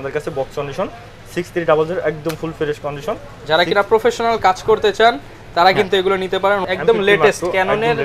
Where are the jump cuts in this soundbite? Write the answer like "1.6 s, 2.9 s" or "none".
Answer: 6.6 s